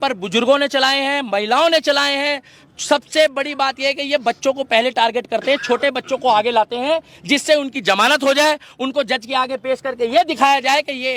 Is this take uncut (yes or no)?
yes